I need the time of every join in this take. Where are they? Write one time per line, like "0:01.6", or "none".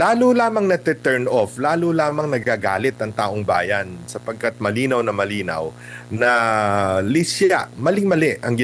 none